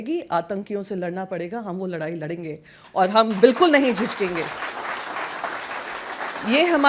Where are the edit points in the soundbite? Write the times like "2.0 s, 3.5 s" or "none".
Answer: none